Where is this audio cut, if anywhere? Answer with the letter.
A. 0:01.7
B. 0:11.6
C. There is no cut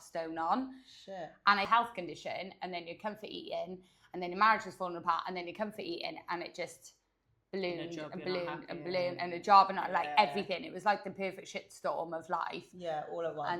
A